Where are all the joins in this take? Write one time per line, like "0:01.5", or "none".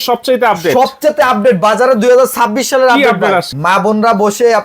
0:03.5